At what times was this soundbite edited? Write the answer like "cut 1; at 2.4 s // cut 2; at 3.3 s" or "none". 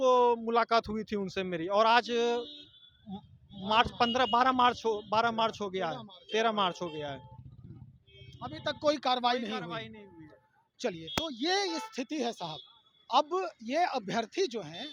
none